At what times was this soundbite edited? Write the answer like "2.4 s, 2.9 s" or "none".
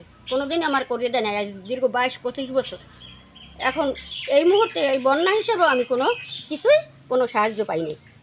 none